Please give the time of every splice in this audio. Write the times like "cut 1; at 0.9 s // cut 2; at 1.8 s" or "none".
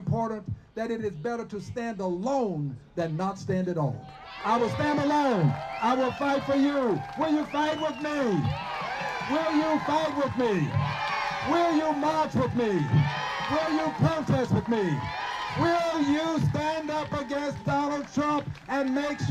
none